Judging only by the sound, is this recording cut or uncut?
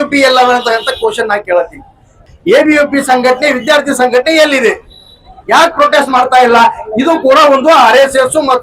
cut